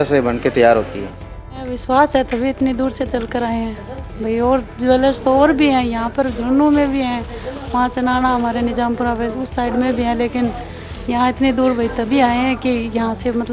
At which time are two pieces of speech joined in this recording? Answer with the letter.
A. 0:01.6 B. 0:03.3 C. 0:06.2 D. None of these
A